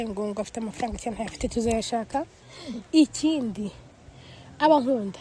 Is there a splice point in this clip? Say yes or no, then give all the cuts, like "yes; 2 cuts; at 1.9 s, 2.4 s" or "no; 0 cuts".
no; 0 cuts